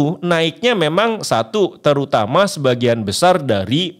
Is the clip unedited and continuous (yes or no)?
yes